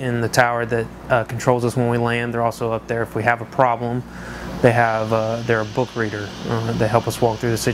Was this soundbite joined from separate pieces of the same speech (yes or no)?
yes